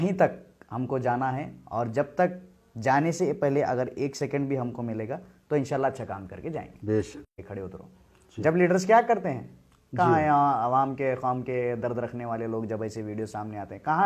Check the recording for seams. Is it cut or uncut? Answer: cut